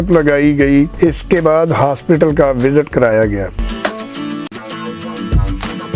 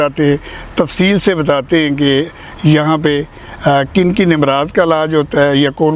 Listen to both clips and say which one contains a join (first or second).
first